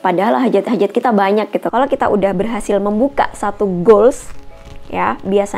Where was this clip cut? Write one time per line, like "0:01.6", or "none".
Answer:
0:01.7